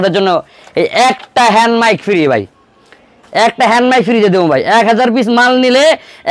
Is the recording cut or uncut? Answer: uncut